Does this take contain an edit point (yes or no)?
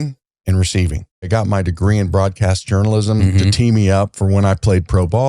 yes